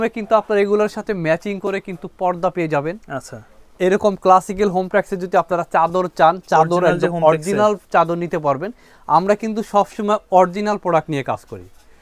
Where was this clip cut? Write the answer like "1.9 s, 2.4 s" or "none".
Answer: none

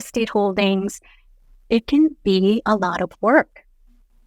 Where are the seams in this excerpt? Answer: none

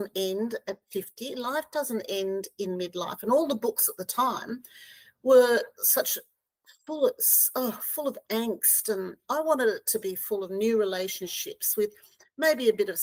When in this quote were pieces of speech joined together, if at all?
none

